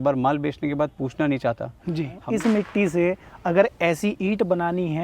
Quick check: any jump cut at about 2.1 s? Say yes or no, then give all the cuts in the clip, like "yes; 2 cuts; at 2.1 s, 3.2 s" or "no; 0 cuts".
yes; 1 cut; at 2.1 s